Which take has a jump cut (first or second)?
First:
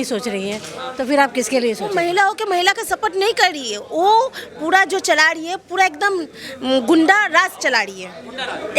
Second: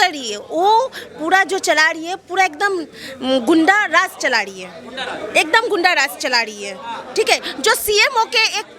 first